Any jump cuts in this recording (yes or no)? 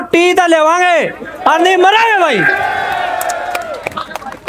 no